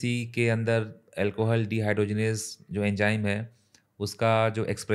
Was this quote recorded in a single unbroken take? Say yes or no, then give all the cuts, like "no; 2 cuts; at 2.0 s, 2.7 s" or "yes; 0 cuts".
yes; 0 cuts